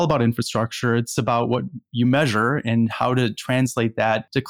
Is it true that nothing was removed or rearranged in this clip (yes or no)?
yes